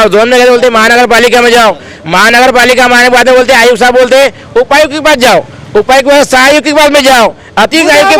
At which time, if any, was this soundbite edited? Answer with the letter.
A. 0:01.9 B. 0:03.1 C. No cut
C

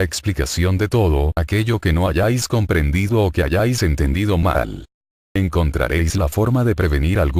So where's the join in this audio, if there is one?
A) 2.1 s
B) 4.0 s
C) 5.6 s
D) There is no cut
B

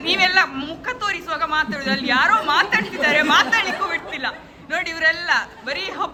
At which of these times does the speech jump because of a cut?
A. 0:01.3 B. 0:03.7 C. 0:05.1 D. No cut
D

